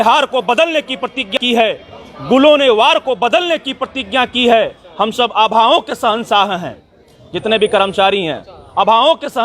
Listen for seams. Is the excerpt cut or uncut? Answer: cut